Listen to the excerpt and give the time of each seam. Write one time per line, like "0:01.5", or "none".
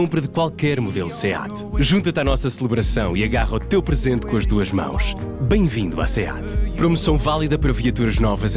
none